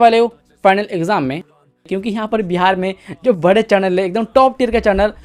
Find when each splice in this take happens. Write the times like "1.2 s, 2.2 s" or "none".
1.5 s